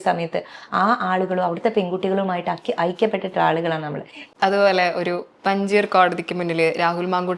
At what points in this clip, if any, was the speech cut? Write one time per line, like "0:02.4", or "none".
0:04.3